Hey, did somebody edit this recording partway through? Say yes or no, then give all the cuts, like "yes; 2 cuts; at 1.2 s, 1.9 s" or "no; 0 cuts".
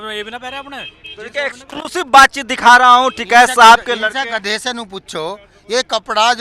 no; 0 cuts